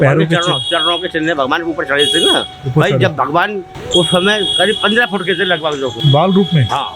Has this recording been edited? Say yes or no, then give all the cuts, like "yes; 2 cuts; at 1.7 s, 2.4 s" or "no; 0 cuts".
yes; 2 cuts; at 3.8 s, 6.0 s